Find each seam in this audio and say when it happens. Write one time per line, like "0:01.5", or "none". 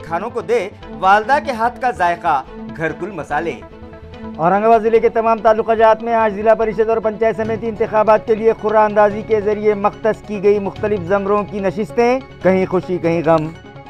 none